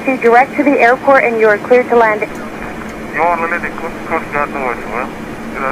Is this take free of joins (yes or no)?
no